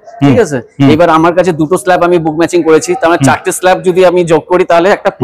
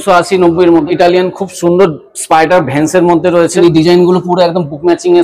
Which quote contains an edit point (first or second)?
second